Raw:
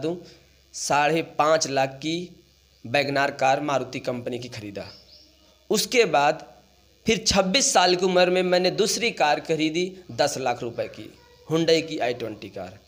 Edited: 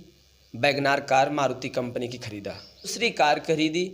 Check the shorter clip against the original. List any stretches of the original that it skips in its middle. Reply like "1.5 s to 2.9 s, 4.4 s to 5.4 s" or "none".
5.3 s to 9.0 s